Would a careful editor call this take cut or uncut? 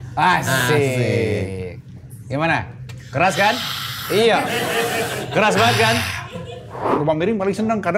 cut